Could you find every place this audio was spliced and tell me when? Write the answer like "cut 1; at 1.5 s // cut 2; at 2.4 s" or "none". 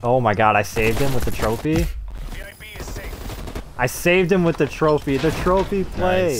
cut 1; at 3.6 s

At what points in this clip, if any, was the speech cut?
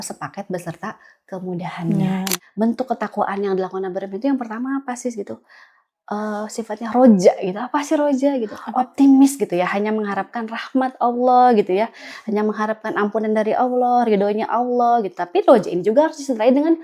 cut 1; at 2.3 s // cut 2; at 8.6 s

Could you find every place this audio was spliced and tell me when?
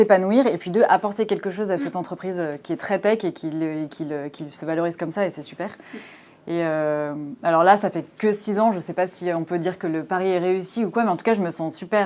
none

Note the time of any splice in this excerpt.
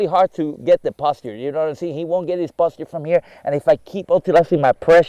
none

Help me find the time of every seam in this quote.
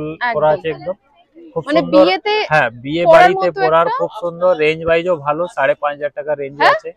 none

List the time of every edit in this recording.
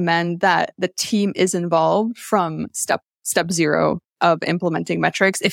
none

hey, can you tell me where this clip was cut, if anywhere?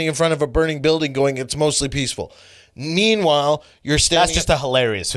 none

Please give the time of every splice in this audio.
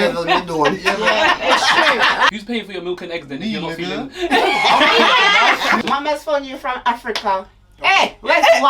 cut 1; at 2.3 s // cut 2; at 5.8 s

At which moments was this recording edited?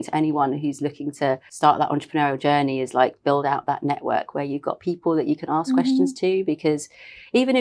cut 1; at 1.5 s

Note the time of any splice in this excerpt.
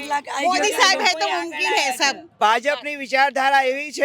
cut 1; at 2.3 s

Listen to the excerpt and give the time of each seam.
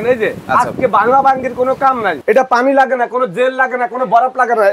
cut 1; at 2.2 s

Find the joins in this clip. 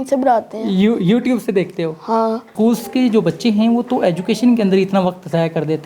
cut 1; at 2.5 s

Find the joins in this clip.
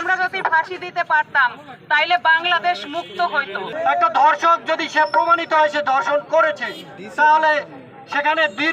cut 1; at 3.6 s

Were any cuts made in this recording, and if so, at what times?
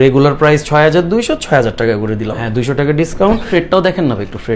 cut 1; at 2.5 s // cut 2; at 3.5 s

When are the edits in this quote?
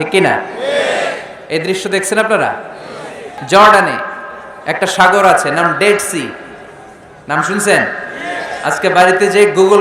cut 1; at 3.3 s

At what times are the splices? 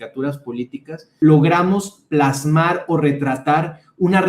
cut 1; at 1.0 s

